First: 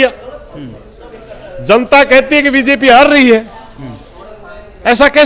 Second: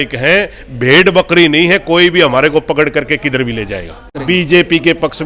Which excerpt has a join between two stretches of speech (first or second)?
second